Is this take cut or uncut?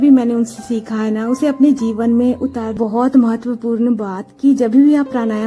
cut